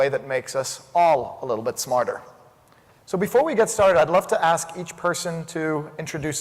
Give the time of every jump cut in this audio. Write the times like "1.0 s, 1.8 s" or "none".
2.6 s